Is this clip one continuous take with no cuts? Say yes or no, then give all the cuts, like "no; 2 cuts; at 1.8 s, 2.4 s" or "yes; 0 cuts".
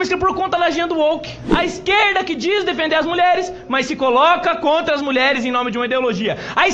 no; 1 cut; at 1.4 s